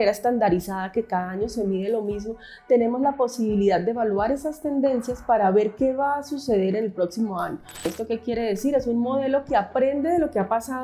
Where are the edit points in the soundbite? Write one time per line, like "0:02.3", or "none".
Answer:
0:07.9